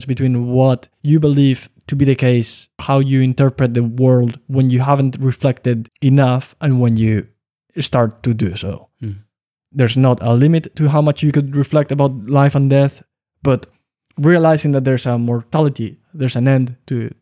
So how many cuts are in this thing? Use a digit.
3